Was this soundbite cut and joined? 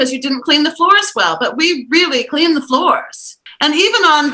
no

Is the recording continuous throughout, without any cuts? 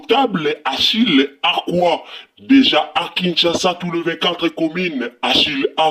yes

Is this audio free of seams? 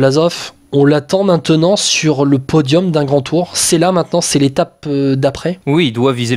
yes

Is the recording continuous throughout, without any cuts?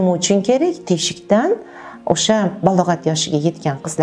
yes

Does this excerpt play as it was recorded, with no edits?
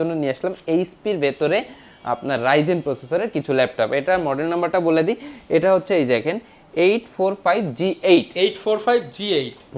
yes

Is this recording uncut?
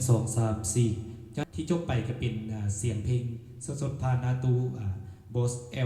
no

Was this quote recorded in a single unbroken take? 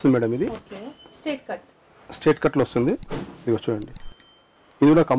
yes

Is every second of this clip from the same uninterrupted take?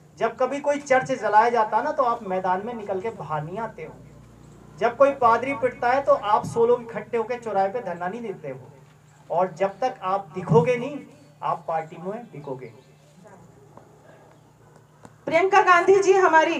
no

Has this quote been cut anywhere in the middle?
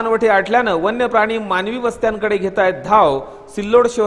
no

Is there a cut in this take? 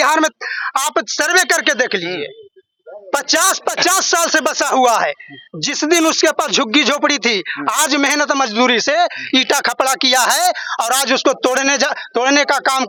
no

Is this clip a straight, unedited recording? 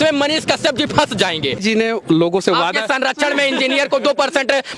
no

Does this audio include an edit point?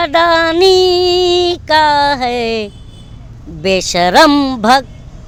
no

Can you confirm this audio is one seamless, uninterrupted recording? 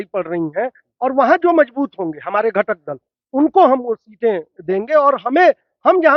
yes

